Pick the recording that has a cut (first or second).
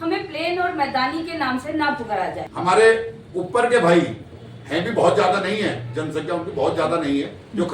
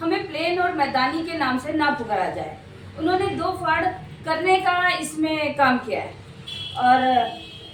first